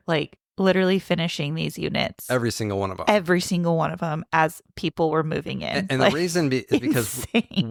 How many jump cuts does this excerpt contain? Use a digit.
0